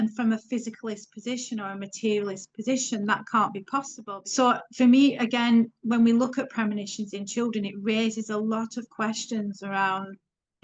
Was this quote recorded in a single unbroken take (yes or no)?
no